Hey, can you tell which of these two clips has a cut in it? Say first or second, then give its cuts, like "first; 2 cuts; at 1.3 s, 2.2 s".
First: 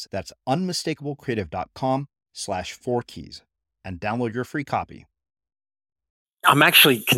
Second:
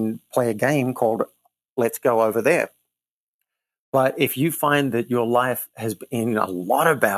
first; 1 cut; at 6.2 s